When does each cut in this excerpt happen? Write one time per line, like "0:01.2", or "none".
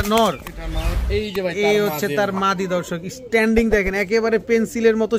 none